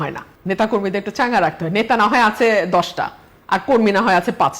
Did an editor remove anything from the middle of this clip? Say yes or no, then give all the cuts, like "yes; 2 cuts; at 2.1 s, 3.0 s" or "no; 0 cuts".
no; 0 cuts